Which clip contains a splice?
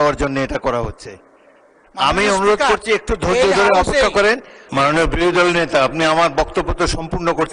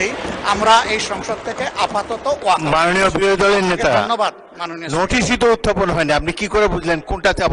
first; 1 cut; at 4.5 s

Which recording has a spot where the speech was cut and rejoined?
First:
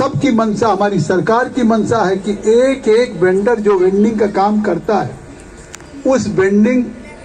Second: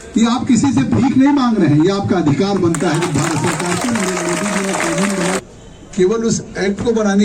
second; 1 cut; at 5.4 s

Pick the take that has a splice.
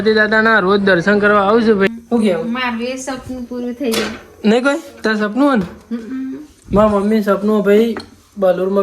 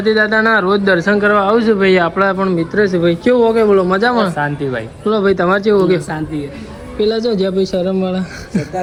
first; 1 cut; at 1.9 s

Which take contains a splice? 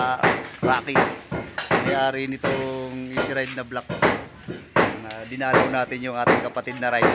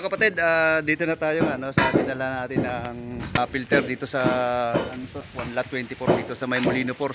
second; 2 cuts; at 3.4 s, 5.1 s

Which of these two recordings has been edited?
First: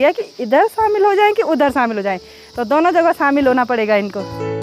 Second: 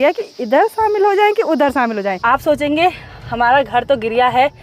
second; 1 cut; at 2.2 s

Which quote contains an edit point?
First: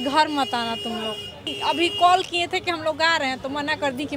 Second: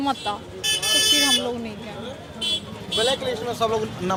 first; 1 cut; at 1.5 s

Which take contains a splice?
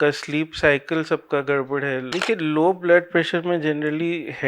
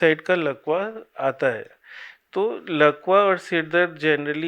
first; 1 cut; at 2.1 s

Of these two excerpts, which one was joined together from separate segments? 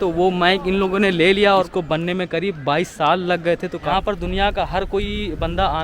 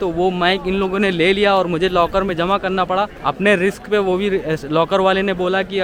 first; 2 cuts; at 1.7 s, 3.8 s

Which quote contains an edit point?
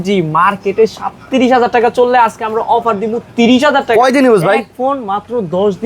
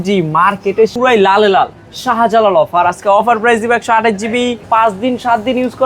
second; 2 cuts; at 0.9 s, 4.6 s

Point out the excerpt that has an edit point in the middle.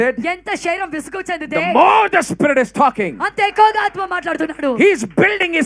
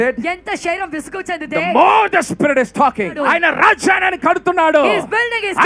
second; 1 cut; at 3.2 s

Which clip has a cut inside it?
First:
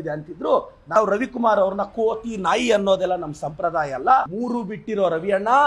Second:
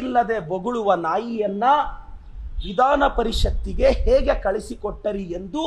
first; 2 cuts; at 0.9 s, 4.3 s

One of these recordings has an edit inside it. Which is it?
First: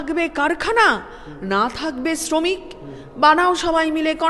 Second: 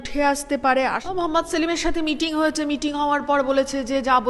second; 1 cut; at 1.0 s

